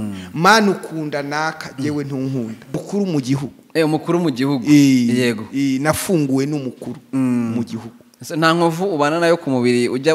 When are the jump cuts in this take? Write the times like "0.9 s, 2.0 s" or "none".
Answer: 2.8 s